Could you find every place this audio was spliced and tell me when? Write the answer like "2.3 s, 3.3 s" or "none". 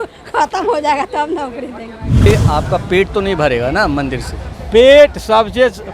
2.3 s